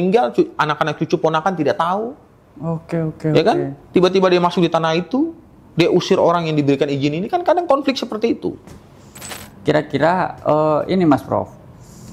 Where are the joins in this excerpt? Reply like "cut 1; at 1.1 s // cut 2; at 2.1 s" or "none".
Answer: cut 1; at 9.4 s